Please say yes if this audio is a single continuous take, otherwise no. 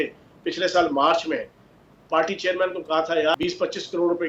no